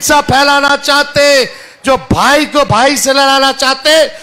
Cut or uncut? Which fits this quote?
uncut